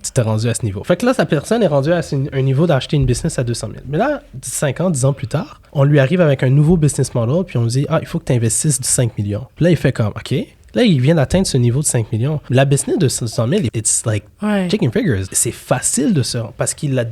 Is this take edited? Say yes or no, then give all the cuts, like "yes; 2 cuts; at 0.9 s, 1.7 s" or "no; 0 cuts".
yes; 4 cuts; at 9.5 s, 12.4 s, 13.7 s, 15.3 s